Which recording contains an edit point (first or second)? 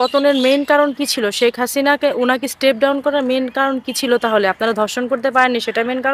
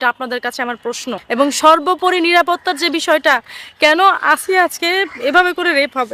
second